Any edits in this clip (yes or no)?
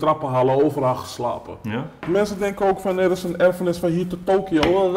yes